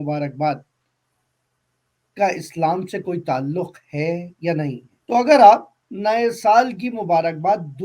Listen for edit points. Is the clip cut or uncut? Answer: cut